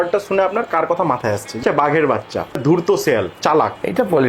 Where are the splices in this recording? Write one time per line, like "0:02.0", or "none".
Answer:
0:01.6
0:02.6
0:03.3